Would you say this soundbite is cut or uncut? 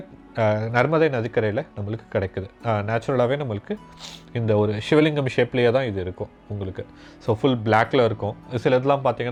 uncut